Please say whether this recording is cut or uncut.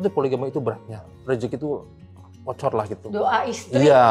cut